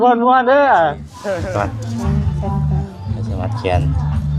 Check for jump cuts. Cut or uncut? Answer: cut